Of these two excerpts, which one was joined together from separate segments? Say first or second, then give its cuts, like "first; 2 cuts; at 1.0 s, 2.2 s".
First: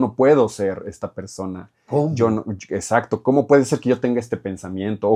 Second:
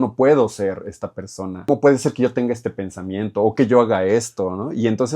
second; 1 cut; at 1.7 s